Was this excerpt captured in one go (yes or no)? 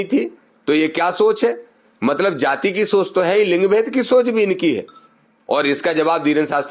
yes